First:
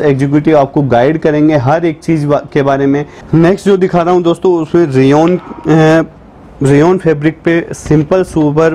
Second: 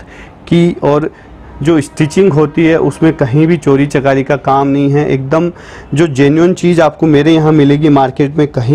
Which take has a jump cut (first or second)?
first